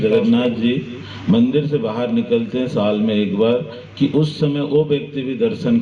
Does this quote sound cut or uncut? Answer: uncut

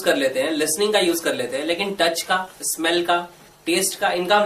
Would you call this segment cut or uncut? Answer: uncut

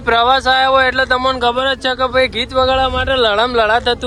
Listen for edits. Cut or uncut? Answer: uncut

